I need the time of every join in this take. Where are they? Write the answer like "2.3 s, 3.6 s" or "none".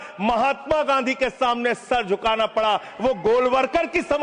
none